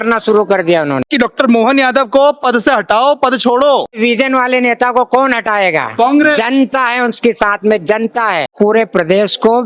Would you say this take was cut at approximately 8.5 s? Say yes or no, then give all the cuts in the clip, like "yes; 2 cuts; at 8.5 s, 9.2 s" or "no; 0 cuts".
yes; 3 cuts; at 1.1 s, 4.0 s, 8.5 s